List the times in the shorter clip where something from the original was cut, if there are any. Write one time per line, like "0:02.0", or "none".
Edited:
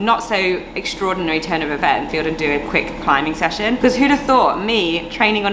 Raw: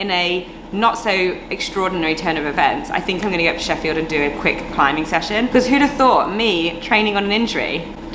0:02.1